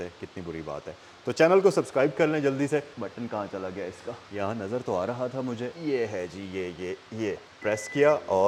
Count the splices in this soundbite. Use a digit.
0